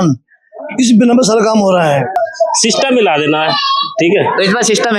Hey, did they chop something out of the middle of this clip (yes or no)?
yes